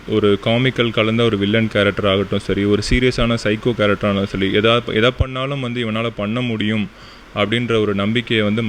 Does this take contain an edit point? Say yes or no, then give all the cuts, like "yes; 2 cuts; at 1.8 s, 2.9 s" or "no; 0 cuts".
no; 0 cuts